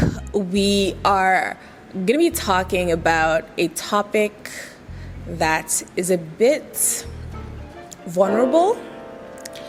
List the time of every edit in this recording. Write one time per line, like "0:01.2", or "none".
none